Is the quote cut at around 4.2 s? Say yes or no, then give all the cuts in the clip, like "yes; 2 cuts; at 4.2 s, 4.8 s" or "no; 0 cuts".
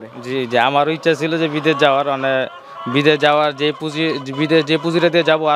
no; 0 cuts